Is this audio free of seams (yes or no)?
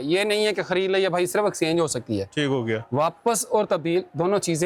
yes